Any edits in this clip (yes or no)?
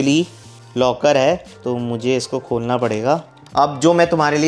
yes